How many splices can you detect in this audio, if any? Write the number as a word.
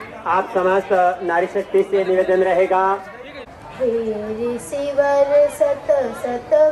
one